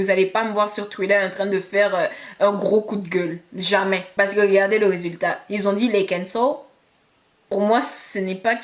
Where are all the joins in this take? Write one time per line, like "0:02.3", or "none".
0:04.1